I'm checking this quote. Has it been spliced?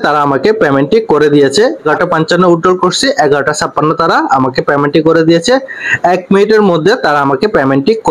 yes; 1 cut; at 1.8 s

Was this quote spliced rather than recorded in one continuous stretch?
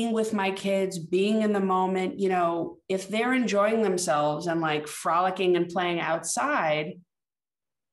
no; 0 cuts

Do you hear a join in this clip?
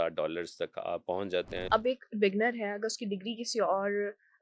yes; 1 cut; at 1.6 s

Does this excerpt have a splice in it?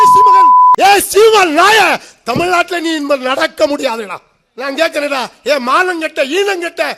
yes; 1 cut; at 1.2 s

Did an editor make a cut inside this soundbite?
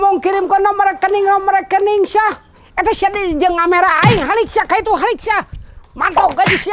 no; 0 cuts

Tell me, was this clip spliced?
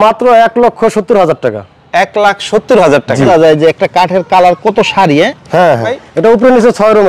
yes; 2 cuts; at 3.3 s, 5.9 s

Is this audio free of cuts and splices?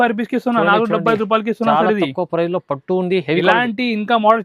yes; 0 cuts

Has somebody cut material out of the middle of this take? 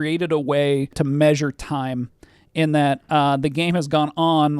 yes; 1 cut; at 1.0 s

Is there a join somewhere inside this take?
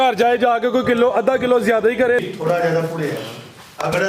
yes; 1 cut; at 2.2 s

